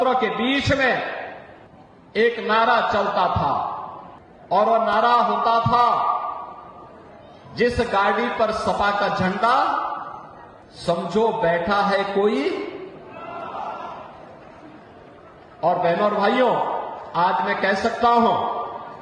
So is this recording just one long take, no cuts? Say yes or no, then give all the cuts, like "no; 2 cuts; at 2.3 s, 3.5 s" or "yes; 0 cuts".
yes; 0 cuts